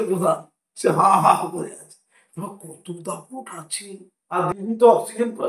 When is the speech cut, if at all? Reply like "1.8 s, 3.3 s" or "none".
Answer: 4.4 s